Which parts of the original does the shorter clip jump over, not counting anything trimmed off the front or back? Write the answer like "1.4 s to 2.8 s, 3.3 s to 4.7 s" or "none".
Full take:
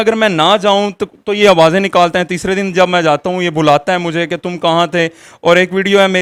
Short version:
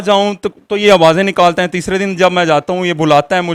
none